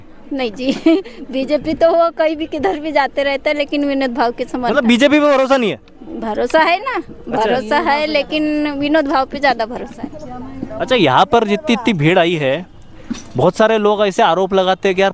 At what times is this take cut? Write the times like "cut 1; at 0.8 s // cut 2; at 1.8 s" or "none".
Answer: cut 1; at 10.0 s